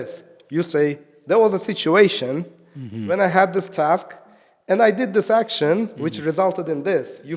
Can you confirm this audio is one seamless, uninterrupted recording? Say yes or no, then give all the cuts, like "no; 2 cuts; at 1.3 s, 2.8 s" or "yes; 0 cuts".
yes; 0 cuts